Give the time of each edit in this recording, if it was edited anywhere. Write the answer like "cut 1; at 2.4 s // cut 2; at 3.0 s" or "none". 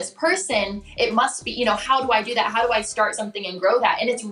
none